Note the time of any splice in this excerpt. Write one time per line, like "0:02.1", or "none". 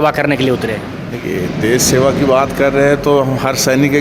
none